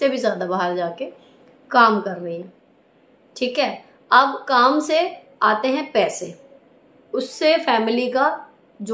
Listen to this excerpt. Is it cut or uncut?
uncut